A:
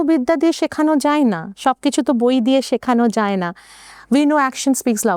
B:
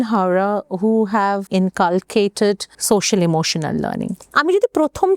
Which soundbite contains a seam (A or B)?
B